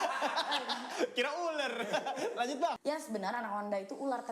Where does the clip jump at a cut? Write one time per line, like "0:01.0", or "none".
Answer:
0:02.8